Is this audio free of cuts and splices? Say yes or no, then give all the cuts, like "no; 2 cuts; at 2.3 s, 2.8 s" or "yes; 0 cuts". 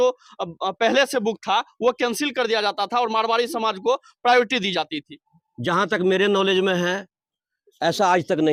yes; 0 cuts